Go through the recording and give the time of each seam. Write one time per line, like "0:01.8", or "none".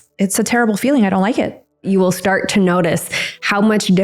0:01.9